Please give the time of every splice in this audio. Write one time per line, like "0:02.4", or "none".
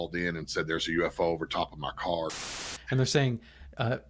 0:02.7

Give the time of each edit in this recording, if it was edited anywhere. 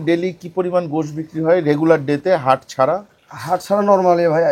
none

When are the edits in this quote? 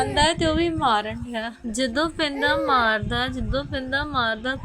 0:01.6

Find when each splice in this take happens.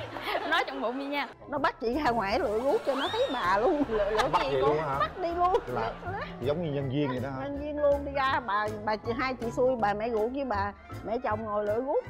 0:01.4

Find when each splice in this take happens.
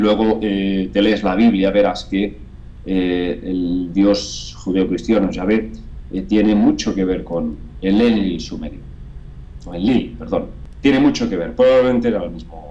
0:10.6

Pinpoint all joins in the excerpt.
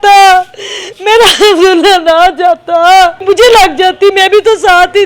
0:03.2

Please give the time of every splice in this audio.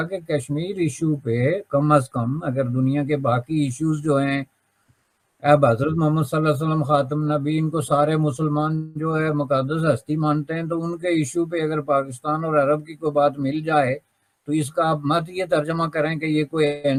none

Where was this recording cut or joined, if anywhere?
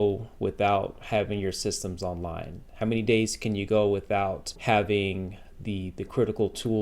0:04.5

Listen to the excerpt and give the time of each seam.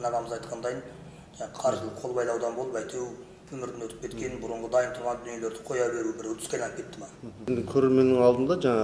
0:07.5

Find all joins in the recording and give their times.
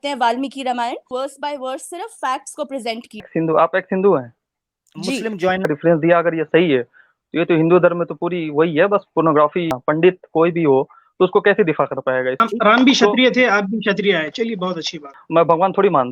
0:01.1
0:03.3
0:05.7
0:09.8
0:12.4
0:15.1

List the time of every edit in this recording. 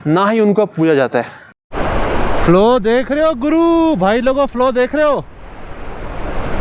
0:01.4

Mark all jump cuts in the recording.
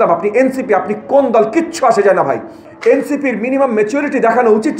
0:02.6

